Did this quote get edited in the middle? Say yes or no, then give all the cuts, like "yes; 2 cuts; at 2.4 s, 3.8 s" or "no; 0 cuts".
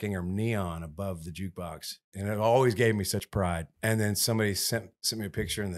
yes; 1 cut; at 3.3 s